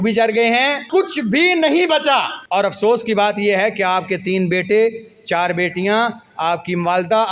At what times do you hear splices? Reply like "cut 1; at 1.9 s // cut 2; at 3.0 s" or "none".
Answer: cut 1; at 0.8 s // cut 2; at 2.4 s